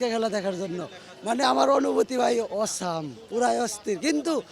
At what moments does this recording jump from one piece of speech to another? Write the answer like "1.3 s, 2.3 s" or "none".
none